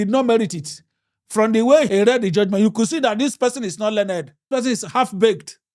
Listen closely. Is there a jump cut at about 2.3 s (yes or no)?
no